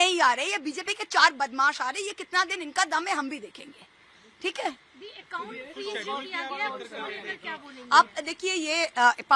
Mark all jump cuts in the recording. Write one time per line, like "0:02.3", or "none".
none